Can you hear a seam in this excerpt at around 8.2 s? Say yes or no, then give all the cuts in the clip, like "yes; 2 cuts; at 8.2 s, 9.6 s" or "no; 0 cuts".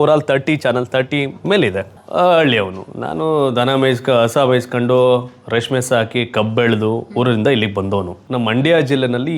yes; 2 cuts; at 2.0 s, 8.2 s